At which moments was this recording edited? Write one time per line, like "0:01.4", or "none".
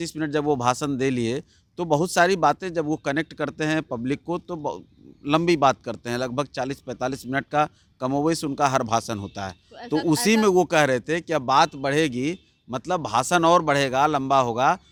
none